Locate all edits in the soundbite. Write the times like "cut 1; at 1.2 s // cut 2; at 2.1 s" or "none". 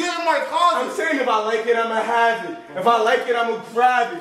none